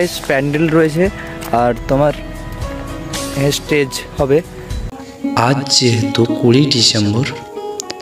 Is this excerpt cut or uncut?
cut